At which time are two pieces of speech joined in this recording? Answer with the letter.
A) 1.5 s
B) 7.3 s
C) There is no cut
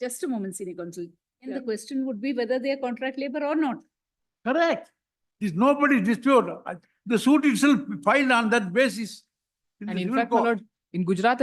A